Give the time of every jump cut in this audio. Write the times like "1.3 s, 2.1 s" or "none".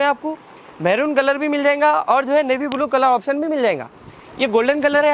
none